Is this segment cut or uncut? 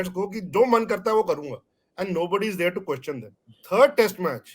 cut